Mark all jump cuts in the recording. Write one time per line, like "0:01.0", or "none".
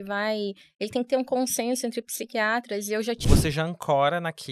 0:03.3